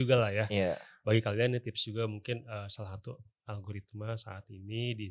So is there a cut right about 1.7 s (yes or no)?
no